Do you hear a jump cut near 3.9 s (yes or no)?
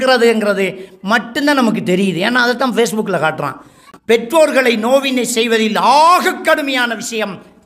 yes